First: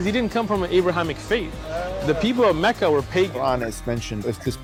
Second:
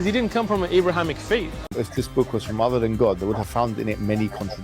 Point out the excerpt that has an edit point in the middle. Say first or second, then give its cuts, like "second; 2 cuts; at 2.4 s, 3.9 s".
second; 1 cut; at 1.6 s